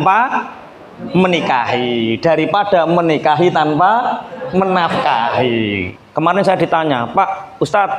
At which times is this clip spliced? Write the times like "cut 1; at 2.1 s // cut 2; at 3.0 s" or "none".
cut 1; at 6.0 s